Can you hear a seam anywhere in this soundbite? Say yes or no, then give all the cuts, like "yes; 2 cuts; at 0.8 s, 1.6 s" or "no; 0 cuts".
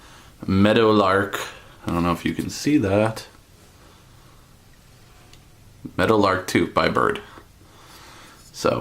no; 0 cuts